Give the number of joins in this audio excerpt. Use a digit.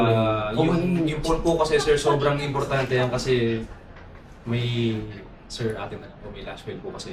0